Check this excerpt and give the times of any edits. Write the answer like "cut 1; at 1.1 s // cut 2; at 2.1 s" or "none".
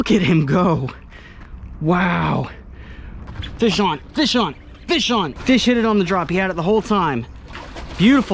cut 1; at 3.5 s // cut 2; at 5.4 s